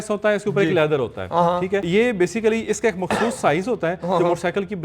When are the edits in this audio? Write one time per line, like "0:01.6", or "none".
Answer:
0:01.8